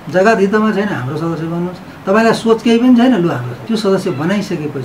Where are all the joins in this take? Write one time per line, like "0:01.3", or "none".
0:03.5